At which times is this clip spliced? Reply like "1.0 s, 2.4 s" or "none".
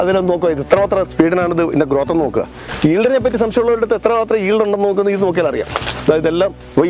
2.6 s